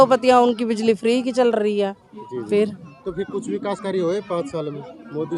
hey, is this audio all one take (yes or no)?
yes